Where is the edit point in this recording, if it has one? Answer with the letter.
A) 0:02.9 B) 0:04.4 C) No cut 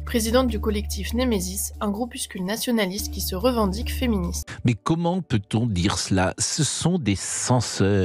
B